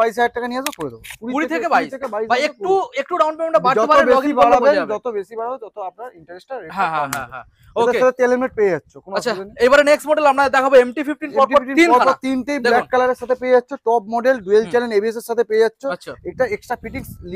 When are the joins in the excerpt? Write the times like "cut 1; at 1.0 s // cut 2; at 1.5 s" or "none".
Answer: none